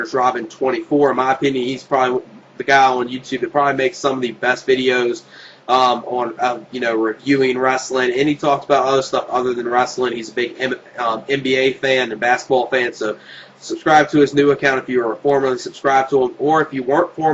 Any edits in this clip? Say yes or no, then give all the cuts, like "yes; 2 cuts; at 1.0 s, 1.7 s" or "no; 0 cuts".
yes; 1 cut; at 11.4 s